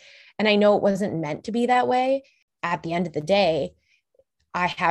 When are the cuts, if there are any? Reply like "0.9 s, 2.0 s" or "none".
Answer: 2.5 s